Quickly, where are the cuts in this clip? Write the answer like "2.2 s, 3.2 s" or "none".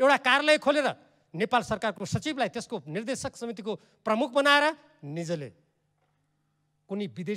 none